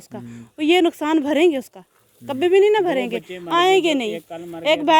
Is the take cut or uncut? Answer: uncut